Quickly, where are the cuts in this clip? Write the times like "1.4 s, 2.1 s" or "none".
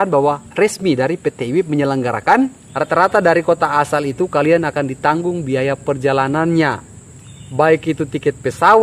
2.7 s